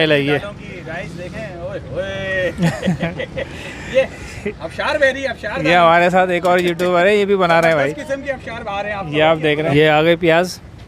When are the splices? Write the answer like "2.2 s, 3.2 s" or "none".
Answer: 9.7 s